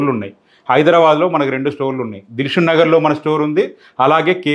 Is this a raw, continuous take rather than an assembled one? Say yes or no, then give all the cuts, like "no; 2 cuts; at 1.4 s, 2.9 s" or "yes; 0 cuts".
yes; 0 cuts